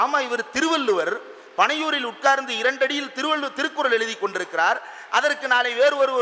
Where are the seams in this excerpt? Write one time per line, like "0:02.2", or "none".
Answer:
none